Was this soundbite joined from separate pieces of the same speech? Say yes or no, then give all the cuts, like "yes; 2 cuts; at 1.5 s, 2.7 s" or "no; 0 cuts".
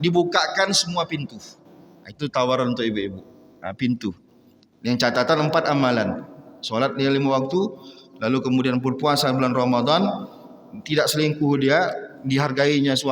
no; 0 cuts